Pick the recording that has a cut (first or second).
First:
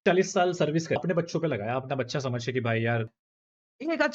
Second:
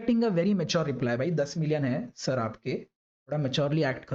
first